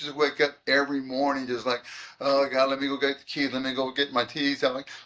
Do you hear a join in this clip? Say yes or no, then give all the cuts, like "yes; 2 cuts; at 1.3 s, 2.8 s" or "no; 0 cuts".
no; 0 cuts